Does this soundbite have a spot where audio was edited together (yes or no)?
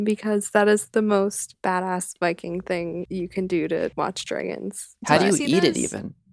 yes